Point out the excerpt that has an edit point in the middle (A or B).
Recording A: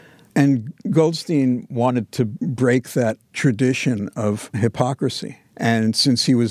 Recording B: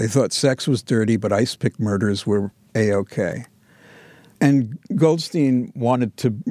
A